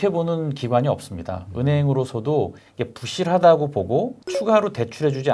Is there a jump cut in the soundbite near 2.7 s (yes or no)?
yes